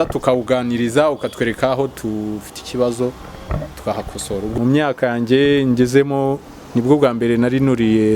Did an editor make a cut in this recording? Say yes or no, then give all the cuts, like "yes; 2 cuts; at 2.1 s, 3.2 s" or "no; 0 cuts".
yes; 1 cut; at 4.5 s